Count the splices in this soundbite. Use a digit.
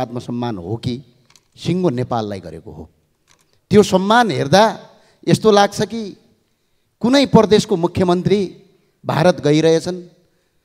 0